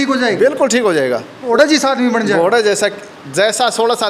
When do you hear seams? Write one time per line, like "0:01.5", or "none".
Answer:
0:01.5